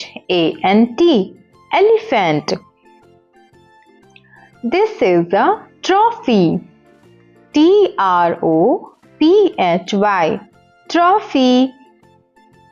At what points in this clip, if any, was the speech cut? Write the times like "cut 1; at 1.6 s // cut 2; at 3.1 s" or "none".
none